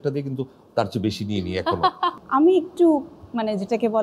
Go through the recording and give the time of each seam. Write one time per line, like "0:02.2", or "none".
0:02.2